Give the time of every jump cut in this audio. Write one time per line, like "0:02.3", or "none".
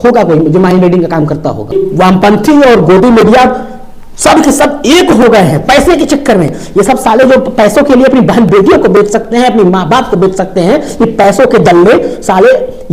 0:01.7